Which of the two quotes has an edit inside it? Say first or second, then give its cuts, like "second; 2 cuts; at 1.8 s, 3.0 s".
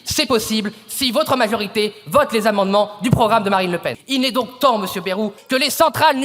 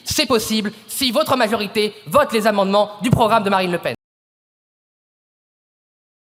first; 2 cuts; at 4.0 s, 5.4 s